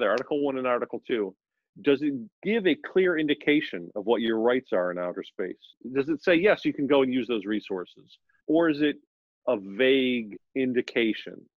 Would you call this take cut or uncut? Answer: cut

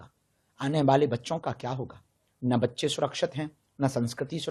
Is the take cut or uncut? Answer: uncut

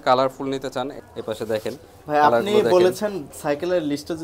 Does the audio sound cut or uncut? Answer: cut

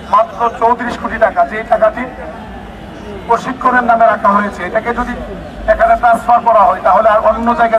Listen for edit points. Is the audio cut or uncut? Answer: uncut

